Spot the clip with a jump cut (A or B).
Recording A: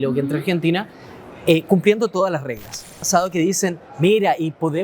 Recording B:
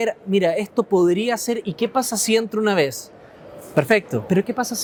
A